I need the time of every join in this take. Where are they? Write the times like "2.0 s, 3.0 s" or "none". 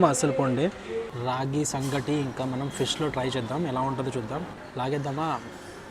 1.1 s, 4.6 s